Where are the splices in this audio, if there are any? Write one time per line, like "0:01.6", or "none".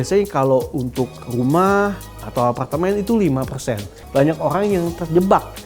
0:03.9